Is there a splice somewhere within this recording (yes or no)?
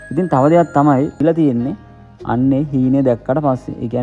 yes